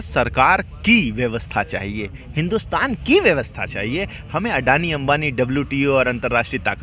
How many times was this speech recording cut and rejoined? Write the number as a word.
zero